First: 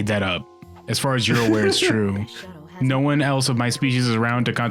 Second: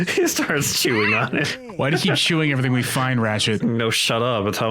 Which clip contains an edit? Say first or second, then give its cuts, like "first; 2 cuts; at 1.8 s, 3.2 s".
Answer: second; 2 cuts; at 1.6 s, 3.6 s